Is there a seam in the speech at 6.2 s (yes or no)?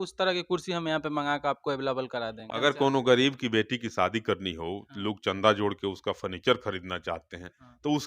no